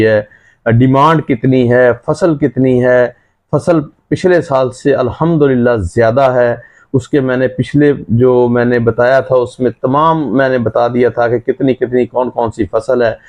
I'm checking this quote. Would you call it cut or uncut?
uncut